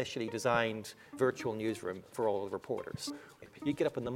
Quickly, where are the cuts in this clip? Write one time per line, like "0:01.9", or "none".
0:01.1
0:03.0

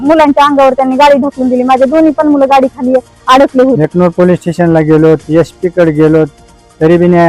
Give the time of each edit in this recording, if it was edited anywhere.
0:03.8

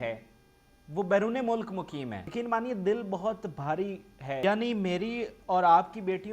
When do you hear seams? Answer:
0:02.2
0:04.4

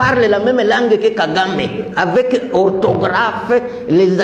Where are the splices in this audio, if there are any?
none

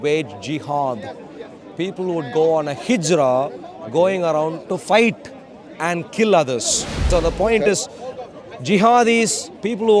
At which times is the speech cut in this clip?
0:07.0

